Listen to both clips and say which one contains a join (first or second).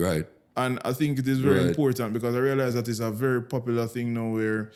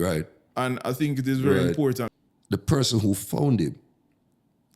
second